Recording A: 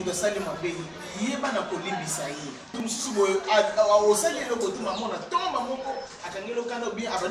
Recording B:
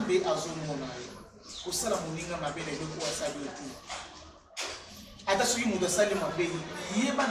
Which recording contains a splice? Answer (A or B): A